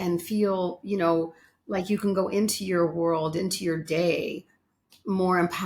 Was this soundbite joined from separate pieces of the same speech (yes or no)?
no